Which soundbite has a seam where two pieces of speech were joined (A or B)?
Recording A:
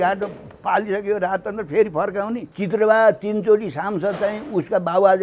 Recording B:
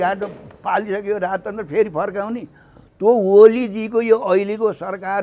A